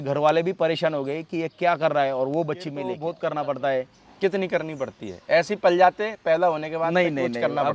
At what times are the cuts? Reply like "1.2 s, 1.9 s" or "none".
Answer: 2.9 s

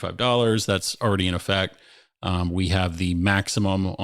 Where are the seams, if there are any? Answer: none

